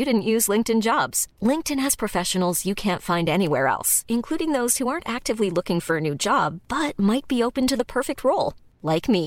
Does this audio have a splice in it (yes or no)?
no